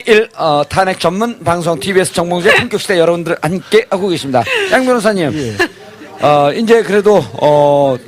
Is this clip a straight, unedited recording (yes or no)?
yes